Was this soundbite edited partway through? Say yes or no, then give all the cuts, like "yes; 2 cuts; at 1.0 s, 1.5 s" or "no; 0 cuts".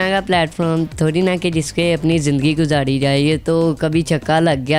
no; 0 cuts